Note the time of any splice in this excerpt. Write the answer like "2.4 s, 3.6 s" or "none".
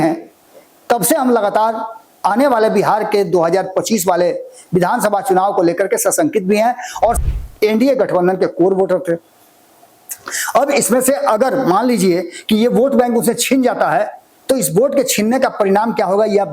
7.2 s